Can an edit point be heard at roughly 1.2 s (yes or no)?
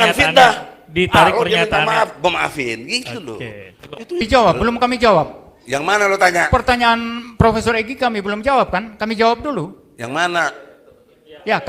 no